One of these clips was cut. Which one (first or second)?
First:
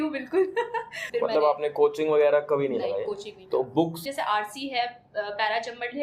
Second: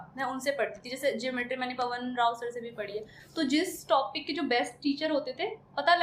first